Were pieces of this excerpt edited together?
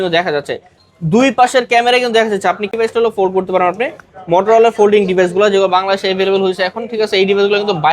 yes; 1 cut; at 2.7 s

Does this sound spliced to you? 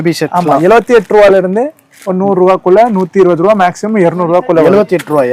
no; 0 cuts

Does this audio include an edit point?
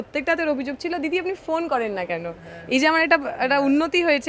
no; 0 cuts

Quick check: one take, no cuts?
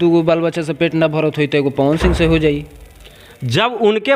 yes; 0 cuts

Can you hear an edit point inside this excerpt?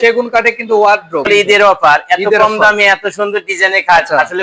yes; 1 cut; at 1.3 s

